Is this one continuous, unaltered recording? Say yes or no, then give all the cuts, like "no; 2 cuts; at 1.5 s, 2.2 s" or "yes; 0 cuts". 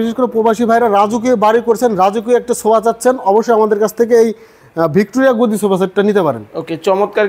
yes; 0 cuts